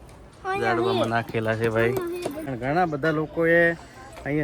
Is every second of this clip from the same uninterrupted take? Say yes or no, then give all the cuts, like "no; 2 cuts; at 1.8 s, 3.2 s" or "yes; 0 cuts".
no; 1 cut; at 2.4 s